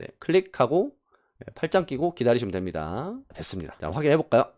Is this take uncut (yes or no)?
yes